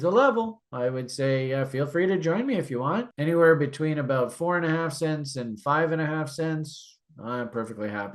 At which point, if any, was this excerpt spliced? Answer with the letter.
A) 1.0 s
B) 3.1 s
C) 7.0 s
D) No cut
B